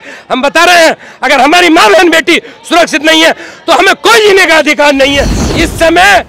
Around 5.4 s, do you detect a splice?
yes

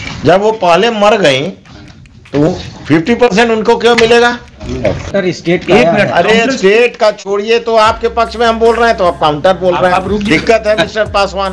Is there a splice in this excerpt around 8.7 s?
no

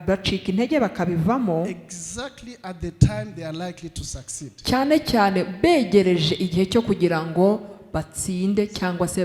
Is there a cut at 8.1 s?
no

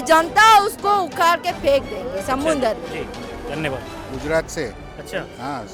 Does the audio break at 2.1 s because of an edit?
no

